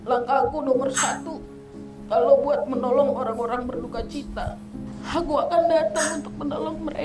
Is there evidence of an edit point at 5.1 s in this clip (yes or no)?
yes